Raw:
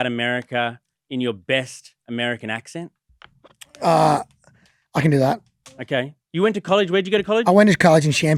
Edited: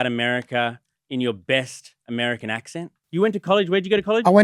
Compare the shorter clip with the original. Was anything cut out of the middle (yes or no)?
yes